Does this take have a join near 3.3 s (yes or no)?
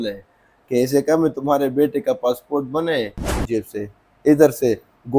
yes